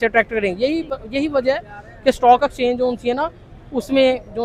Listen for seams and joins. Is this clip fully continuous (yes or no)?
yes